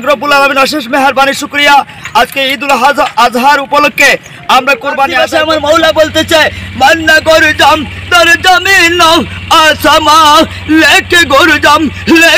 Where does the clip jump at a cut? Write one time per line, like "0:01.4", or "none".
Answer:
0:05.1